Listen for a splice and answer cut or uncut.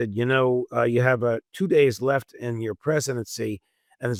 uncut